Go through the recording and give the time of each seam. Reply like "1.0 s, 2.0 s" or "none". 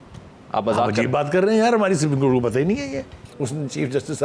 3.2 s